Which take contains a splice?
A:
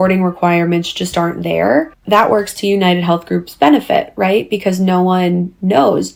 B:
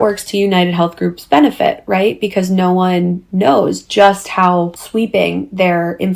B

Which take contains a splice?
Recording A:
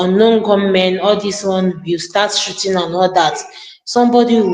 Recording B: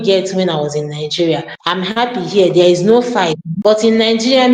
B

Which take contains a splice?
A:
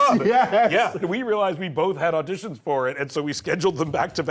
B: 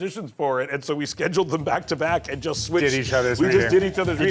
A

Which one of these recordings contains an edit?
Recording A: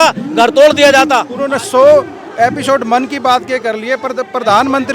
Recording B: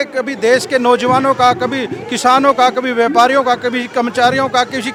A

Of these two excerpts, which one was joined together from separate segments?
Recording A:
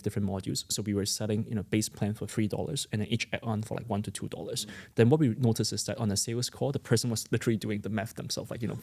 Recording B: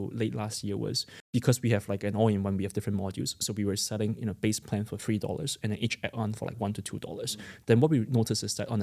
B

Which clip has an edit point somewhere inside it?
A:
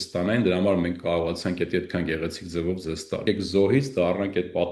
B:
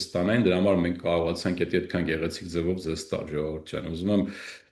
A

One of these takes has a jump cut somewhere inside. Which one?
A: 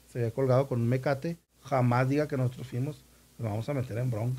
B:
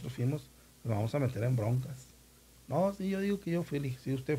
A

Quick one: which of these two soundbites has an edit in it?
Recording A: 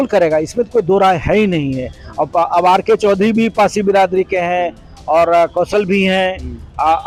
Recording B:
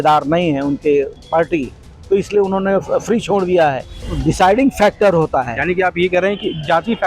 B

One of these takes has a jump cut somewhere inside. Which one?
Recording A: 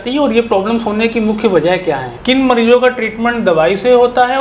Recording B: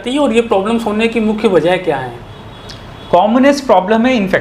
A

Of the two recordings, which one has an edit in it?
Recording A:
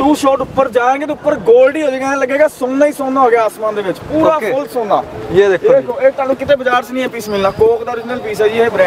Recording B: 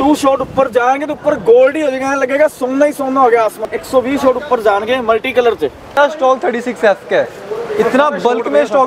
B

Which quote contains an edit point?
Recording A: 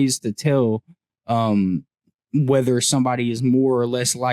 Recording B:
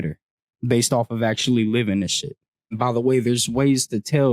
B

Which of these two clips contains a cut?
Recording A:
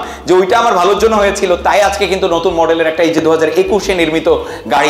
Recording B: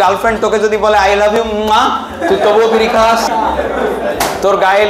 B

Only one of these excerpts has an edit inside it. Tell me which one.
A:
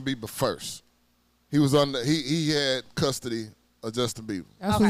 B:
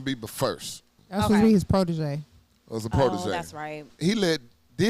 B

